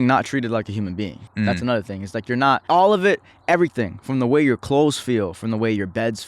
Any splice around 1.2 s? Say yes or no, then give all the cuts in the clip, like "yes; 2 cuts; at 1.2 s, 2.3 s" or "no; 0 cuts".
yes; 2 cuts; at 1.2 s, 2.6 s